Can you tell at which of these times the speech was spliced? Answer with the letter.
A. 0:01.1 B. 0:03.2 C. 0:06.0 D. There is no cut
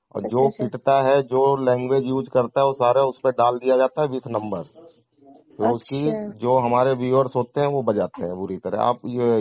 D